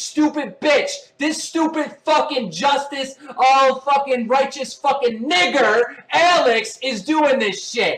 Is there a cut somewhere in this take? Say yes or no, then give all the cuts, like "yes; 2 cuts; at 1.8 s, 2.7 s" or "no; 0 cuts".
no; 0 cuts